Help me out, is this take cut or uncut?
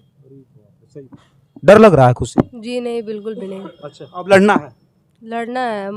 uncut